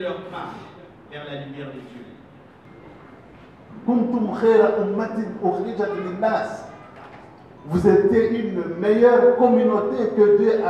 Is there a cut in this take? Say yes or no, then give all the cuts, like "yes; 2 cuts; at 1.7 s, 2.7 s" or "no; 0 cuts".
yes; 1 cut; at 2.7 s